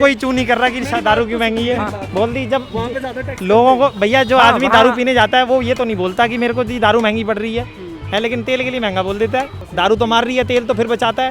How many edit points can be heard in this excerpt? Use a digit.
2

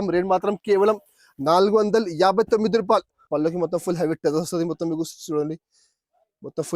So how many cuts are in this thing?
1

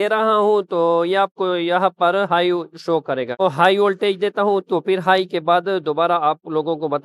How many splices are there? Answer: 1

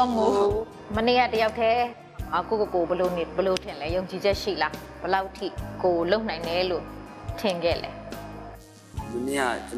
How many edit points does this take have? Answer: 1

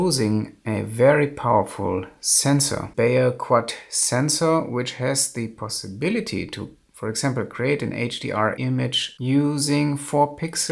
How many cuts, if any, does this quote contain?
2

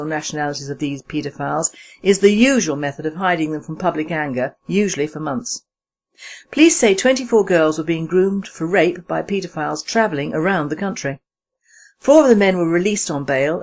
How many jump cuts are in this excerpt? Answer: 1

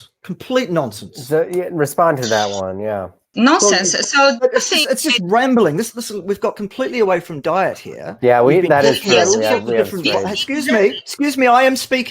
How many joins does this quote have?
1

